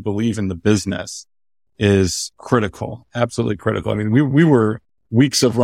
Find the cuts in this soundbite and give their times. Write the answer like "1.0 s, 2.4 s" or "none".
2.3 s

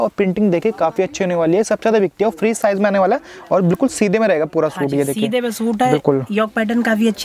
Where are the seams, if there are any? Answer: none

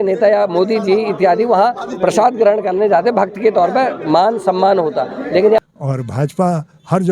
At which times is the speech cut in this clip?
5.6 s

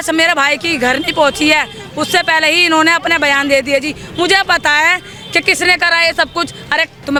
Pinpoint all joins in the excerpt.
none

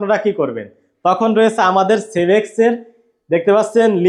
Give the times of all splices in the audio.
none

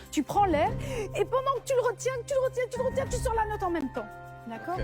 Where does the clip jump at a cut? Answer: 3.5 s

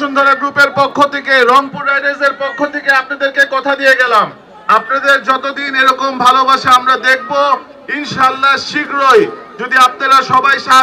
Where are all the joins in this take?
none

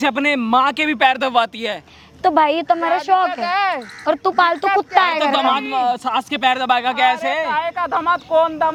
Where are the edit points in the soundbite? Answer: none

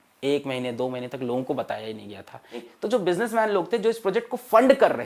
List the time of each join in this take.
2.6 s

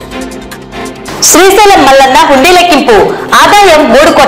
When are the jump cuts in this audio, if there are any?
0.9 s

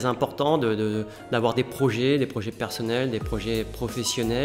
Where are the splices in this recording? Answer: none

